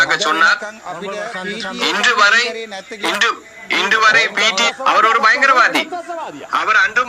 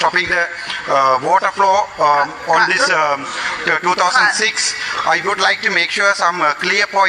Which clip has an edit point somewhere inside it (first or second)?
first